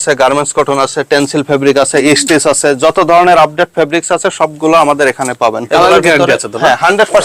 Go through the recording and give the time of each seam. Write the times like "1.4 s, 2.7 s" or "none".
5.6 s